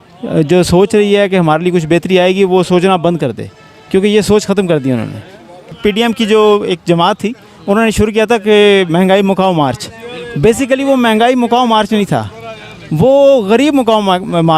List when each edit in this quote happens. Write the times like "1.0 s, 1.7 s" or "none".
5.8 s

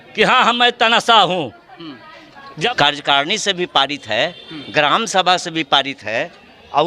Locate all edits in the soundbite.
2.7 s

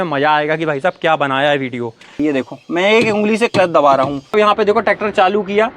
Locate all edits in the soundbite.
2.1 s, 4.3 s

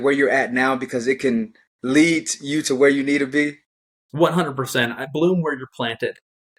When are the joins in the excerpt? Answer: none

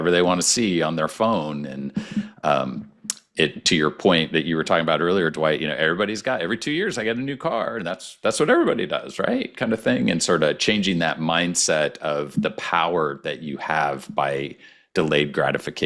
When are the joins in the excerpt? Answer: none

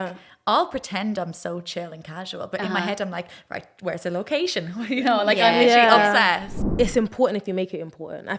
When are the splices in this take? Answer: 6.5 s

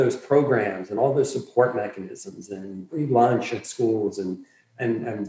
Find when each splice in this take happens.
2.9 s

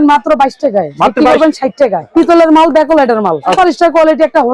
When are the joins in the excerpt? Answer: 2.0 s, 3.5 s

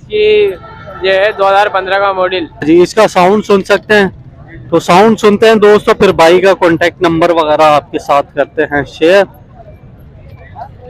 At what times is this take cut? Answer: 2.6 s

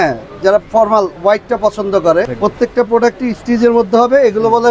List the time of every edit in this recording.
2.3 s

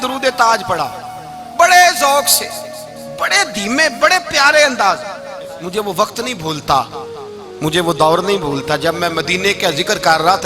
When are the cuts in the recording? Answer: 5.4 s

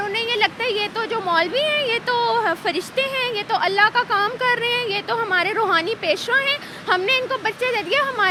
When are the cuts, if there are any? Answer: none

